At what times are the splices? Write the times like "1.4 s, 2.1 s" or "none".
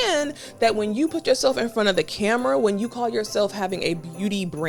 none